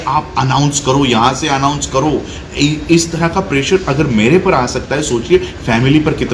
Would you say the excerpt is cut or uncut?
uncut